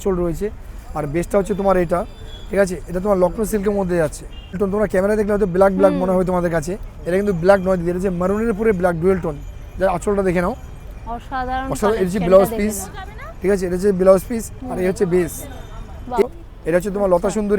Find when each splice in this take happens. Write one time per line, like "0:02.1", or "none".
0:04.6
0:16.2